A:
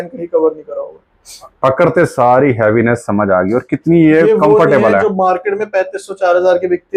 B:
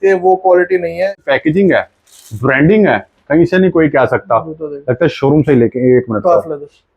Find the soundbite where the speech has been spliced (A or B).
B